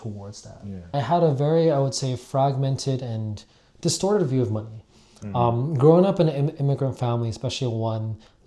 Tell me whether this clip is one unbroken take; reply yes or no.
no